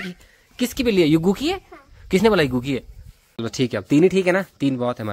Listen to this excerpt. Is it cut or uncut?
cut